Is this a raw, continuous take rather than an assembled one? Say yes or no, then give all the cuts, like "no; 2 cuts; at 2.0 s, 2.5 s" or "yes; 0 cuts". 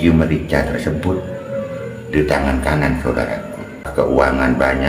no; 1 cut; at 3.9 s